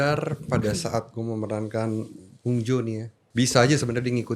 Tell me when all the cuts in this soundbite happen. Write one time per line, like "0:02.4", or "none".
0:03.1